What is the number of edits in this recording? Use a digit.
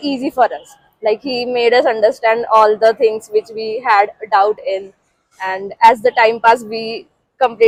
0